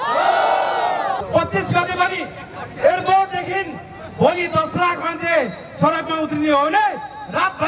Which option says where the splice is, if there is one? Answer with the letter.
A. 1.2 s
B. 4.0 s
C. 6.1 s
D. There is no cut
A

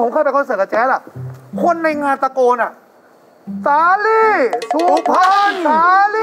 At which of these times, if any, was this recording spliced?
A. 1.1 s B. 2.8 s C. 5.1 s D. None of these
D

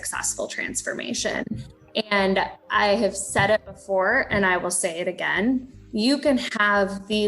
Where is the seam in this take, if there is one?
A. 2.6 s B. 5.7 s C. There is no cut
C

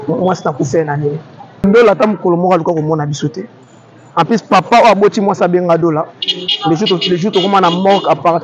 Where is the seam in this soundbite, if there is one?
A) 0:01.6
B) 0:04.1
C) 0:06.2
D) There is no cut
A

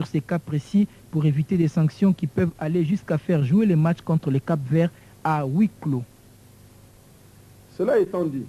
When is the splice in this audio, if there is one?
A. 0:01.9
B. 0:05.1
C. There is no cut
B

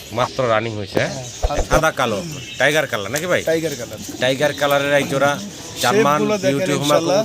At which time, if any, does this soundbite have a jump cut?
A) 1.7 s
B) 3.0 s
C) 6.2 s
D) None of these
A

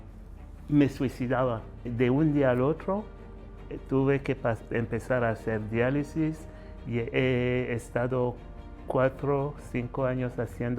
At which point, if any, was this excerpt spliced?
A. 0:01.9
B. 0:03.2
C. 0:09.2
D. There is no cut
A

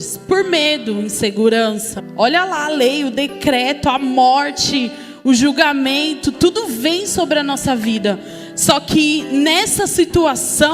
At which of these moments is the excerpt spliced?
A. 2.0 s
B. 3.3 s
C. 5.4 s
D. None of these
A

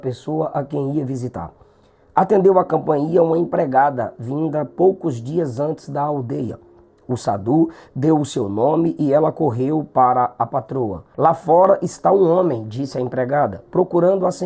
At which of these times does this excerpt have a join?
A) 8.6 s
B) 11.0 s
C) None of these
B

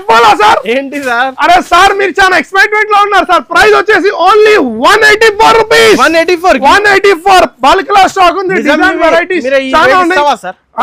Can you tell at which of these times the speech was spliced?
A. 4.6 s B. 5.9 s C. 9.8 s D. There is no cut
D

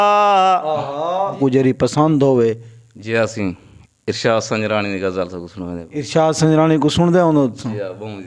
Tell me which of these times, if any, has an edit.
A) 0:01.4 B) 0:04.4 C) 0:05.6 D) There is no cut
A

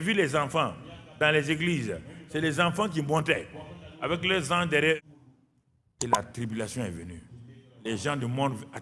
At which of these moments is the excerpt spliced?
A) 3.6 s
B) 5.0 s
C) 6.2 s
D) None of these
B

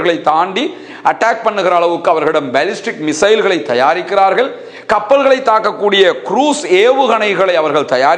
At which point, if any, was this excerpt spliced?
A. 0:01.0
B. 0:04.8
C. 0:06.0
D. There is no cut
D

